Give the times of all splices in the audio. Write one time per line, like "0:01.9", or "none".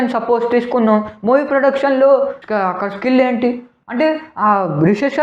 0:03.9